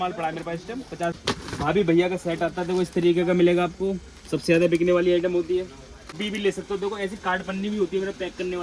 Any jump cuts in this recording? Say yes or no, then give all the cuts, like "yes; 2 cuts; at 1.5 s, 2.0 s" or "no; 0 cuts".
yes; 2 cuts; at 1.2 s, 6.2 s